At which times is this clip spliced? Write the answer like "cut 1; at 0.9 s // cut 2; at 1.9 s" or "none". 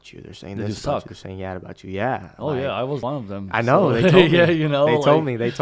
cut 1; at 3.0 s